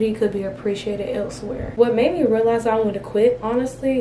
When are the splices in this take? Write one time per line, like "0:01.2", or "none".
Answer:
0:01.7